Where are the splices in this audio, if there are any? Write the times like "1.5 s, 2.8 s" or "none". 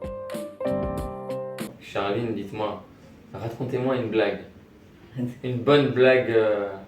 1.8 s